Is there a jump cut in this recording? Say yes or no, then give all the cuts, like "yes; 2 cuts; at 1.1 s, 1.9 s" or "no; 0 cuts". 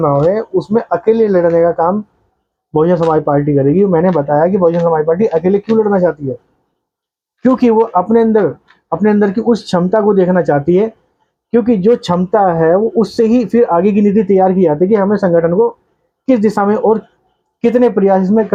no; 0 cuts